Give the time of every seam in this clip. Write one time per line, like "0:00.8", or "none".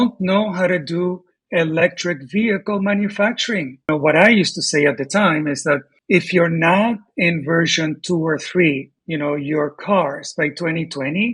0:03.9